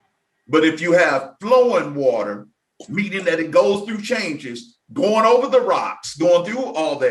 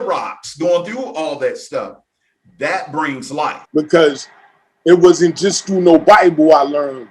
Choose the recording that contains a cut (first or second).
second